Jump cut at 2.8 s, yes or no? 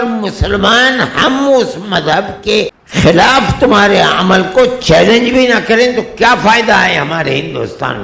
yes